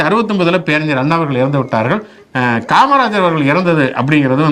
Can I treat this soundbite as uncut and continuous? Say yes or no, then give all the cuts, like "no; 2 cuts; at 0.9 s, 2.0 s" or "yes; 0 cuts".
yes; 0 cuts